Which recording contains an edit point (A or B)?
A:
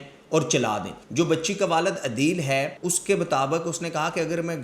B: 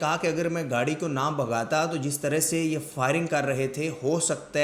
A